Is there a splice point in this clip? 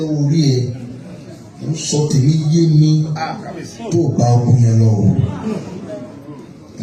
no; 0 cuts

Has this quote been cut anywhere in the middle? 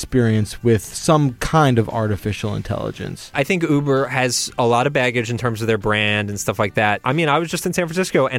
yes; 2 cuts; at 3.3 s, 7.0 s

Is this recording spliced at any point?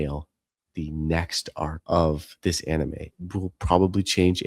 yes; 2 cuts; at 1.8 s, 3.1 s

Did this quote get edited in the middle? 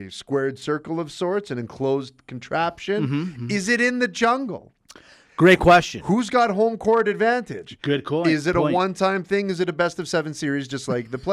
no; 0 cuts

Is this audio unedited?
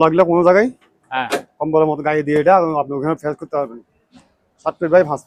yes; 0 cuts

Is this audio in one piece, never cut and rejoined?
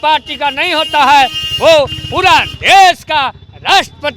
yes; 0 cuts

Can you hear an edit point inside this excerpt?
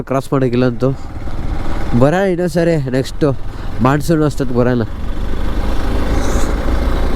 no; 0 cuts

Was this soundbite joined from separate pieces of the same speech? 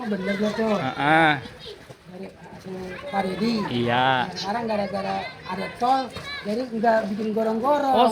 no; 0 cuts

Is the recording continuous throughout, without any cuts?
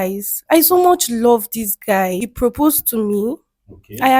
no; 1 cut; at 2.3 s

